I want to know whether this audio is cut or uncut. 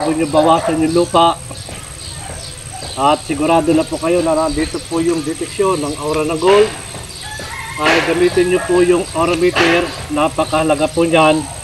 uncut